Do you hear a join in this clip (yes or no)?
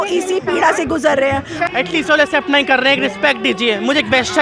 yes